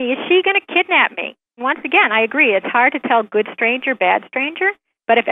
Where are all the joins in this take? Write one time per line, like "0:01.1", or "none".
0:01.6